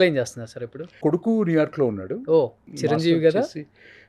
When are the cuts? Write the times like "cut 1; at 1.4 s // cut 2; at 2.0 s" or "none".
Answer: cut 1; at 1.0 s // cut 2; at 2.6 s